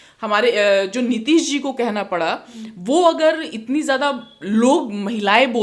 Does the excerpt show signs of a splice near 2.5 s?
no; 0 cuts

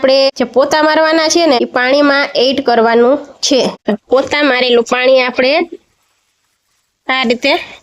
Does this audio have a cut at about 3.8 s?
yes; 1 cut; at 3.8 s

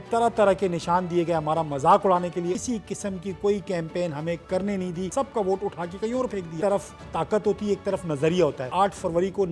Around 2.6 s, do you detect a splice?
yes; 4 cuts; at 2.6 s, 5.1 s, 6.5 s, 8.7 s

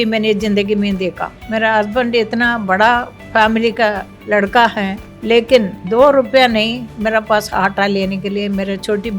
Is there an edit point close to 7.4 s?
no; 5 cuts; at 1.3 s, 3.2 s, 4.1 s, 5.1 s, 5.8 s

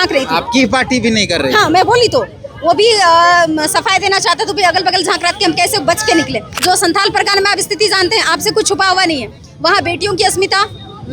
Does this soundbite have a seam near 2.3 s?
no; 1 cut; at 6.5 s

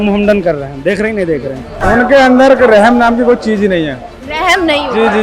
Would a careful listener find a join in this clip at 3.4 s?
no; 1 cut; at 1.7 s

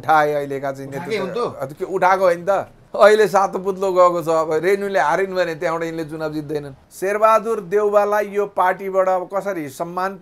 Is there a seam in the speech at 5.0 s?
no; 2 cuts; at 2.8 s, 6.8 s

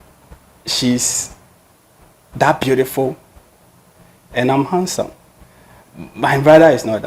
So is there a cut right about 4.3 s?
no; 0 cuts

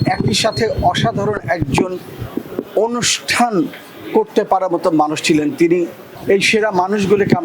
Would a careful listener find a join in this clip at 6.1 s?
yes; 1 cut; at 6.1 s

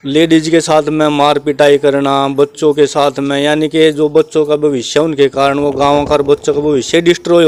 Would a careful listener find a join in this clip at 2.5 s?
no; 0 cuts

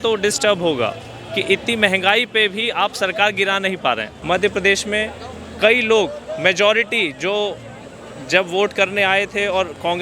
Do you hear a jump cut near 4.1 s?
yes; 1 cut; at 4.1 s

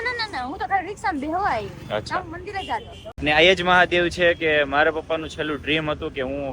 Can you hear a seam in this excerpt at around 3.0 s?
yes; 1 cut; at 3.0 s

